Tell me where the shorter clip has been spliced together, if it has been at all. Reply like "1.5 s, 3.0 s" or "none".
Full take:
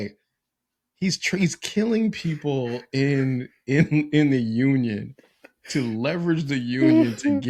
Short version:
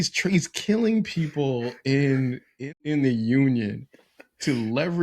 2.6 s